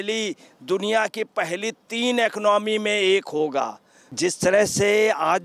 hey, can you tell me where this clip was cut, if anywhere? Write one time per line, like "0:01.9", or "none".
0:04.1

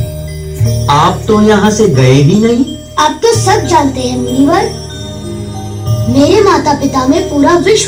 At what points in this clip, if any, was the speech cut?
none

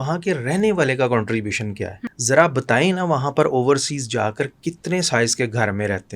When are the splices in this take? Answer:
0:02.1

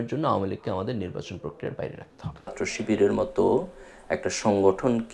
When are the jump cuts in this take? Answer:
0:02.5

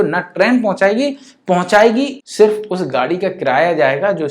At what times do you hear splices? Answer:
0:02.1

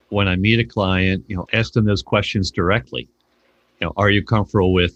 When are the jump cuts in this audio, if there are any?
none

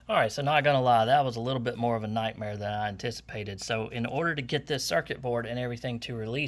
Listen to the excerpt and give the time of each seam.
none

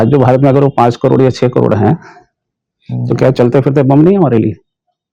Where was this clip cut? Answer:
none

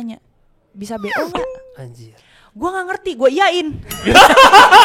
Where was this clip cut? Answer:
none

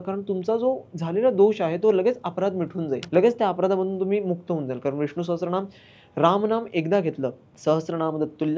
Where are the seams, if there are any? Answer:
0:03.0
0:07.5

